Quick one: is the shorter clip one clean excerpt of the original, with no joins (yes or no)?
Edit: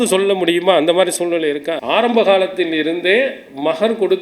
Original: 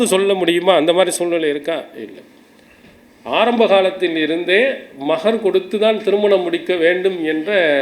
no